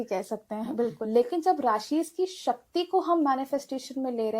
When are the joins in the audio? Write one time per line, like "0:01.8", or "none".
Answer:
0:01.0